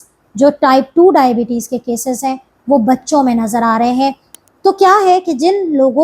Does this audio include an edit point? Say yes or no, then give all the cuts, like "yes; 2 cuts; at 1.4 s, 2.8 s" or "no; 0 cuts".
yes; 1 cut; at 4.3 s